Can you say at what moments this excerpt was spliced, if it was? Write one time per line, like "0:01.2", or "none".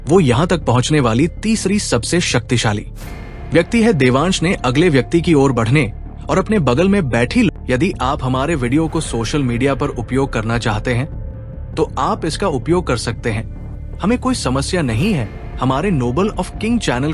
0:07.5